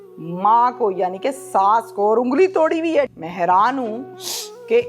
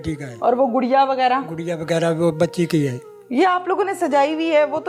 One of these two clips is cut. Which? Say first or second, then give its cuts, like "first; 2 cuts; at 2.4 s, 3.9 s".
first; 1 cut; at 3.1 s